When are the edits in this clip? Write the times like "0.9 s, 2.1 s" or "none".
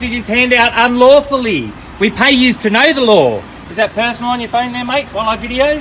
3.6 s

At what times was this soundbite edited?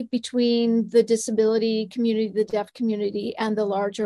none

